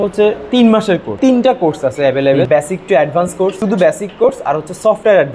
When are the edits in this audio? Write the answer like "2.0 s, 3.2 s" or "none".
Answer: 1.1 s, 2.5 s, 3.6 s